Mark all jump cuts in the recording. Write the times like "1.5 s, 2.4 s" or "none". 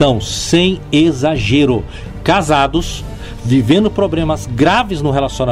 1.9 s